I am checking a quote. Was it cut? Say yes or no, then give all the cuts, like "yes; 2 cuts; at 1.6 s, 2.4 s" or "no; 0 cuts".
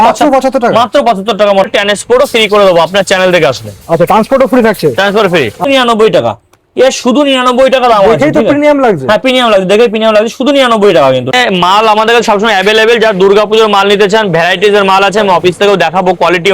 yes; 3 cuts; at 1.6 s, 5.7 s, 11.3 s